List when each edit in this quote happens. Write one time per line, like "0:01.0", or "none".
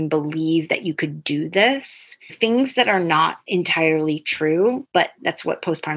0:02.3
0:03.4
0:05.1